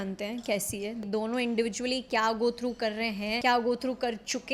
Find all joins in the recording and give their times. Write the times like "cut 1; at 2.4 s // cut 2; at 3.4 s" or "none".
cut 1; at 1.0 s // cut 2; at 3.4 s